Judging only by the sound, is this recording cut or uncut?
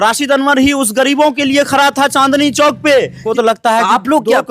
cut